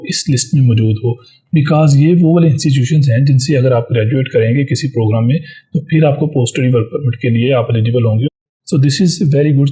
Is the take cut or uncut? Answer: cut